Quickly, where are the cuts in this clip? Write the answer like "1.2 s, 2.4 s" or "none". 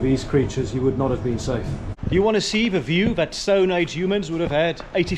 1.7 s